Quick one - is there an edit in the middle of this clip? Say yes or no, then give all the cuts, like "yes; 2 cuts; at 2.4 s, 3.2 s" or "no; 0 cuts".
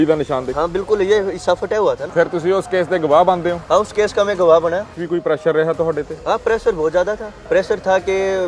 yes; 3 cuts; at 2.0 s, 5.0 s, 7.3 s